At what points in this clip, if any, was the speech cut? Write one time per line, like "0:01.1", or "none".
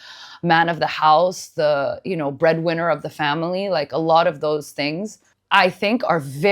none